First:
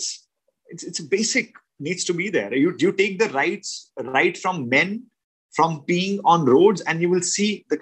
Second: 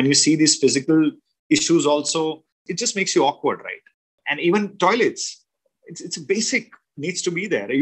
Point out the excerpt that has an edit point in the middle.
second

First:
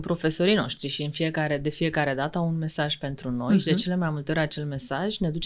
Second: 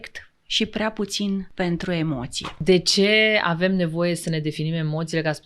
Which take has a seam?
second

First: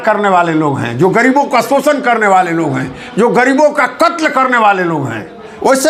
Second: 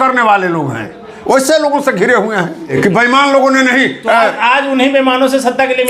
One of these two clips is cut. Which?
second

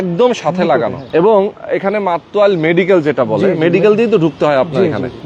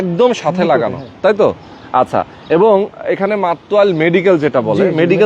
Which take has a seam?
first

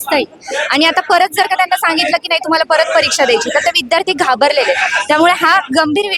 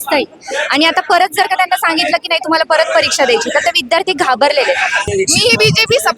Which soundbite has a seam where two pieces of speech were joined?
second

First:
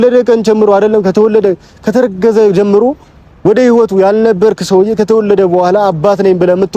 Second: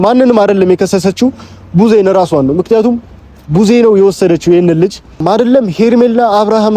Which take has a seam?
second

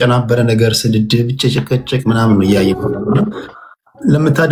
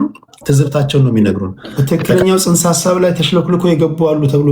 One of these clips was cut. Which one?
second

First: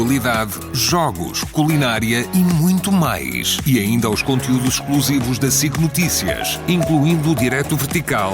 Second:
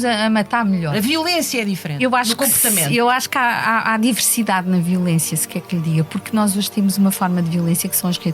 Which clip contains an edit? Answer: second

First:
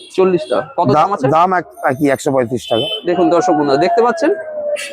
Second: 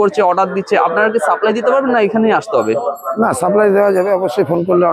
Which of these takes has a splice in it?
first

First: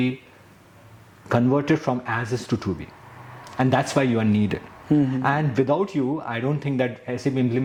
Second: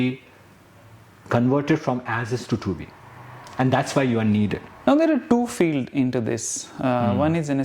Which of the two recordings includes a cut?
second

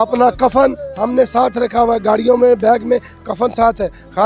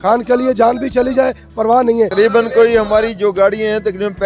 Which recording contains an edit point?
second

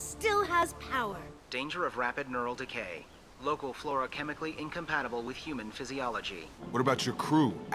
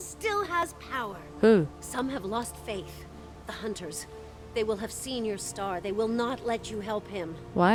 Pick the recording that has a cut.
first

